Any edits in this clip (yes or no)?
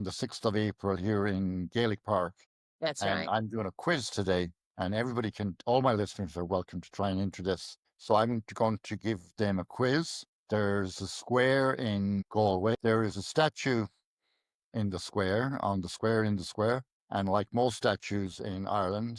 yes